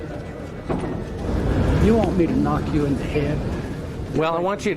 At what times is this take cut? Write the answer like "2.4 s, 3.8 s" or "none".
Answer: 1.2 s